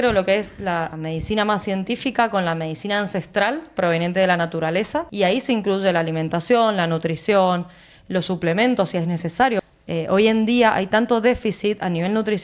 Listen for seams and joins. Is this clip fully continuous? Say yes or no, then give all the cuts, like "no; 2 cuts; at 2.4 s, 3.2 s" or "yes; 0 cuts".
no; 3 cuts; at 0.9 s, 5.1 s, 9.6 s